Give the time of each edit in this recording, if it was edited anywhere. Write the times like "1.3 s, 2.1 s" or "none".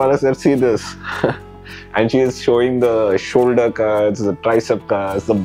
none